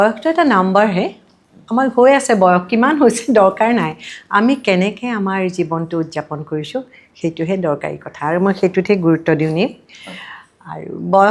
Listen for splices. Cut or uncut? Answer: uncut